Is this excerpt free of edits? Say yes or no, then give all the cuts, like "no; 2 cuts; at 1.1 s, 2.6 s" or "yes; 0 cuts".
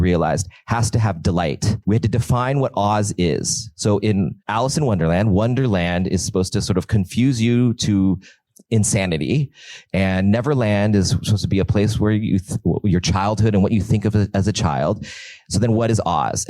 no; 2 cuts; at 1.8 s, 4.4 s